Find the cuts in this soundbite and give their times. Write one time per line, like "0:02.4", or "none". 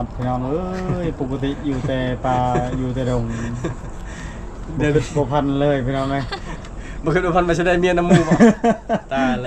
none